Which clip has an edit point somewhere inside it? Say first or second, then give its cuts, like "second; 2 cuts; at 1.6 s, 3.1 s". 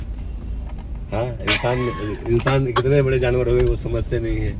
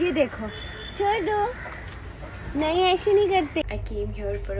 second; 1 cut; at 3.6 s